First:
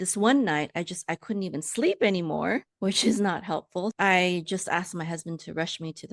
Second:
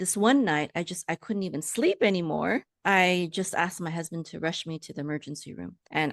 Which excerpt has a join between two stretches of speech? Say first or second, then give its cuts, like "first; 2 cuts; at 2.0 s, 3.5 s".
second; 1 cut; at 2.8 s